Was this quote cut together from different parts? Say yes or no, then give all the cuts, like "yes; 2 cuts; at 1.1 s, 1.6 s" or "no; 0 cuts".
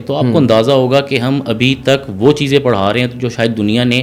no; 0 cuts